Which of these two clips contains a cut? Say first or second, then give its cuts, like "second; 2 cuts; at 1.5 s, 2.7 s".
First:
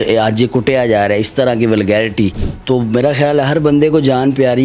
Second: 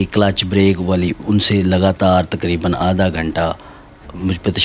first; 1 cut; at 2.5 s